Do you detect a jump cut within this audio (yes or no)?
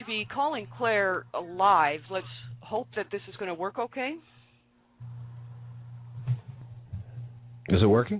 yes